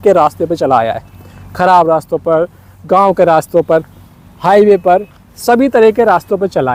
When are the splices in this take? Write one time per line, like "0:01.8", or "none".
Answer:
none